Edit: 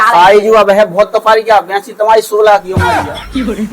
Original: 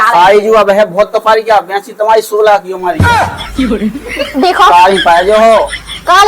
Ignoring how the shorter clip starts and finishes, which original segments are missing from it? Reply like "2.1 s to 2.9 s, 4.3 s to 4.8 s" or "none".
2.8 s to 3.0 s